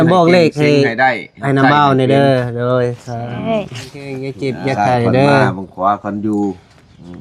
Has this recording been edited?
yes; 1 cut; at 4.4 s

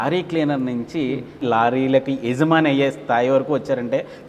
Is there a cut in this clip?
yes; 1 cut; at 1.3 s

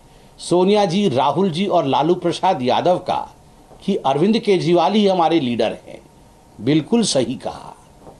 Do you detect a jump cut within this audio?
no; 0 cuts

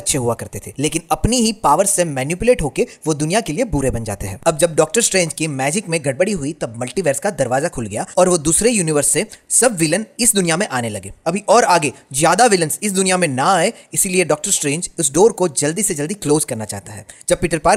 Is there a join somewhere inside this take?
no; 0 cuts

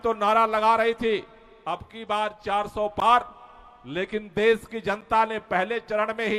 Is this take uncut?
yes; 0 cuts

